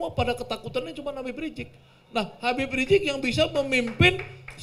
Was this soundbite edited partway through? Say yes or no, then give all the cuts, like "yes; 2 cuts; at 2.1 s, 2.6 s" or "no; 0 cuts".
no; 0 cuts